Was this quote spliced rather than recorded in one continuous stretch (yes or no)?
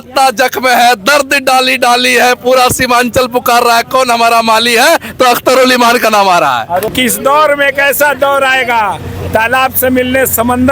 yes